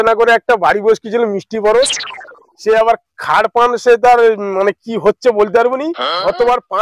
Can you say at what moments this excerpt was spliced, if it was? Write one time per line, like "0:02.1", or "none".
none